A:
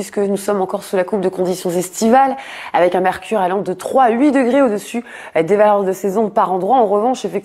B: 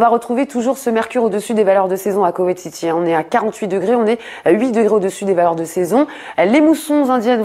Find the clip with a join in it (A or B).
B